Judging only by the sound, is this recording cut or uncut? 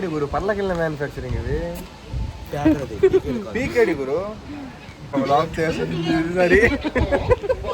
cut